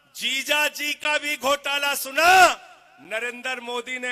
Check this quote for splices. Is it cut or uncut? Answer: uncut